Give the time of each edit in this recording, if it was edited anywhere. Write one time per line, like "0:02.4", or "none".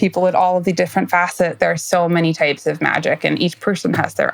0:01.6